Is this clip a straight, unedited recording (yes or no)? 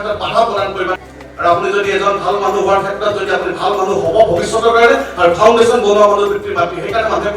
no